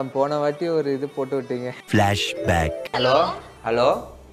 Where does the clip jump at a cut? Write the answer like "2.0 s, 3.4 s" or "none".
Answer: none

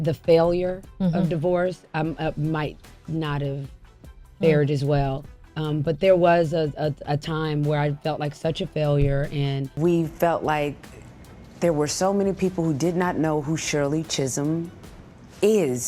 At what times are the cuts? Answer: 9.7 s

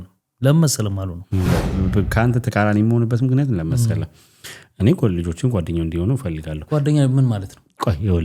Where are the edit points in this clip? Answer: 1.5 s

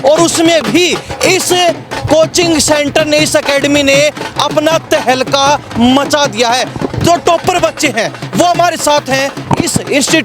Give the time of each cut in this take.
none

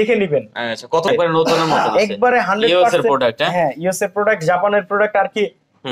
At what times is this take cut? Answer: 1.1 s

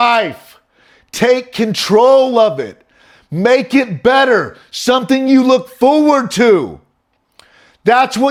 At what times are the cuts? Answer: none

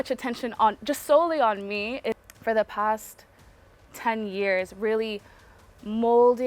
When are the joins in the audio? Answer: 2.2 s

